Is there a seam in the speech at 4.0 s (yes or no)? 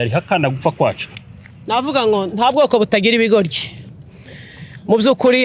no